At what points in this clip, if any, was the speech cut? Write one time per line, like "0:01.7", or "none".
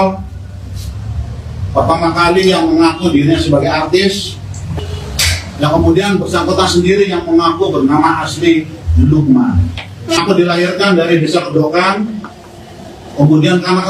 0:04.8
0:10.1